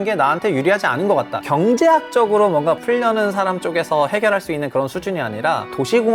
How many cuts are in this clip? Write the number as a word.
two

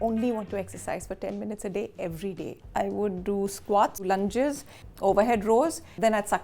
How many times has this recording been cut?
two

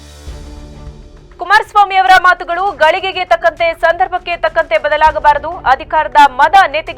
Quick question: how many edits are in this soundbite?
one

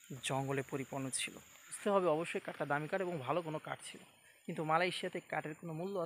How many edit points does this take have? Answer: one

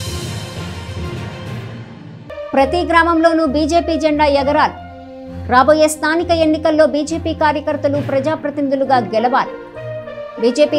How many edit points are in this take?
one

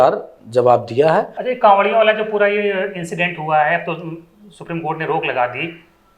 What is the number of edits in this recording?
one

